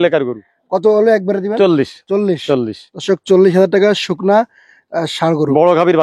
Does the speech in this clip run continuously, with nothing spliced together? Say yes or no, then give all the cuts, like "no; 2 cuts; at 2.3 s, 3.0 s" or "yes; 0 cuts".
yes; 0 cuts